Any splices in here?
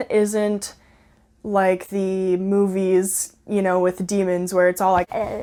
no; 0 cuts

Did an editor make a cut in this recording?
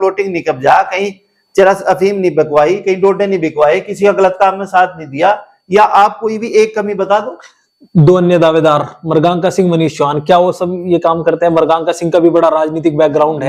no; 0 cuts

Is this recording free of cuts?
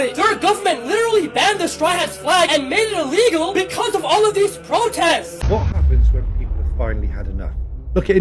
no; 1 cut; at 5.3 s

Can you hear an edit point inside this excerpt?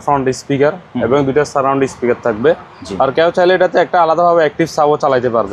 no; 0 cuts

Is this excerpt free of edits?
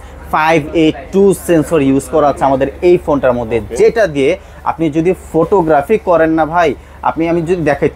yes; 0 cuts

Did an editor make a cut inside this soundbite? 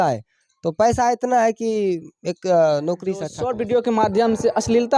yes; 1 cut; at 3.3 s

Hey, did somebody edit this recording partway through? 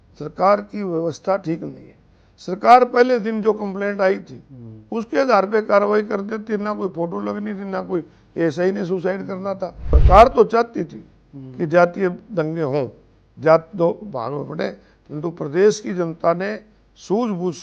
yes; 1 cut; at 9.9 s

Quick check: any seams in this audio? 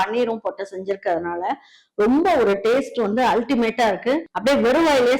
yes; 1 cut; at 4.2 s

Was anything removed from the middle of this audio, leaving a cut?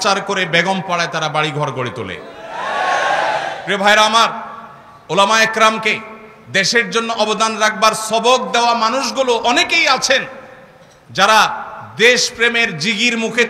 no; 0 cuts

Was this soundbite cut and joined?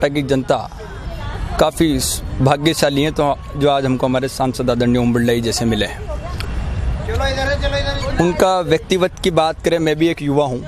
no; 0 cuts

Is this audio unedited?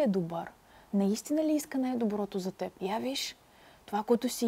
no; 1 cut; at 2.7 s

